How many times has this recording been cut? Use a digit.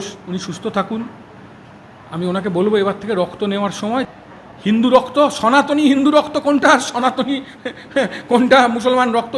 1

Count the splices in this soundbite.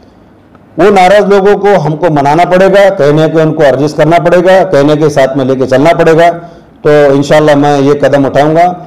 0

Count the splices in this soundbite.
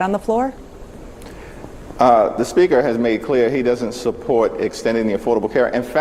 1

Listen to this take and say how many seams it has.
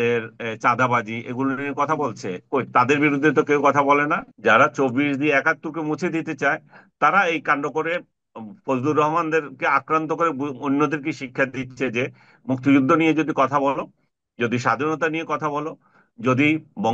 1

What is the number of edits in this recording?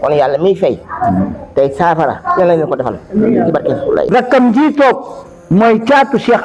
1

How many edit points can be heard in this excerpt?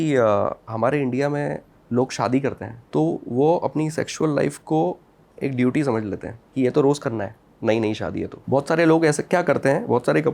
4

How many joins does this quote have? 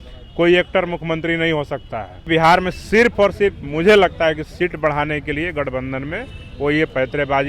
1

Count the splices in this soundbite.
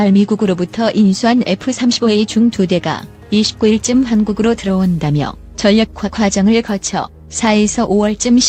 0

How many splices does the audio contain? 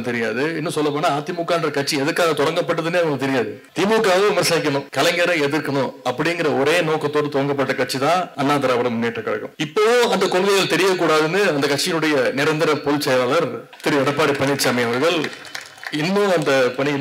5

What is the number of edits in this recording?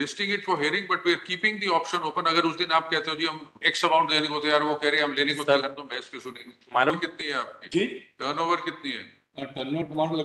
1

